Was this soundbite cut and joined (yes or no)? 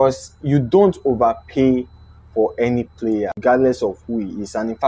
yes